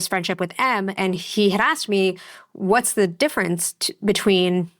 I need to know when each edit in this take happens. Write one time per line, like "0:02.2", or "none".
0:01.0